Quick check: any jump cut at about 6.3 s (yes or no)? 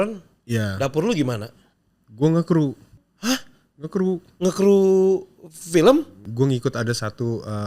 yes